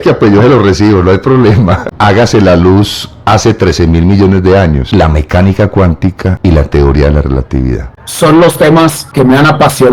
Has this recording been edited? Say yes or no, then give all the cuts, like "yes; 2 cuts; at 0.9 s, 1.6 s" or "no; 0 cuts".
yes; 5 cuts; at 1.8 s, 4.8 s, 6.3 s, 8.0 s, 9.0 s